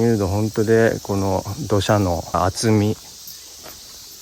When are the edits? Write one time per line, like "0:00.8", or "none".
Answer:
0:02.3

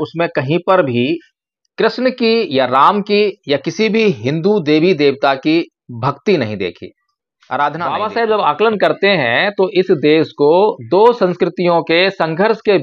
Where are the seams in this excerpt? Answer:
0:07.8

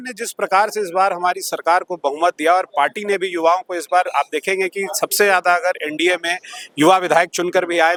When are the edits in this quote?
none

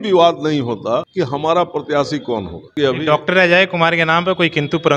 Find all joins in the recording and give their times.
0:01.1
0:02.7

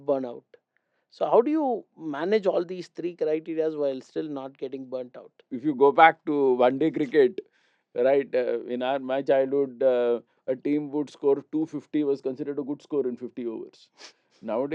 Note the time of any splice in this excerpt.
0:05.5

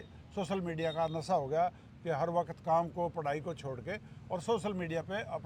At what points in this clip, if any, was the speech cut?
none

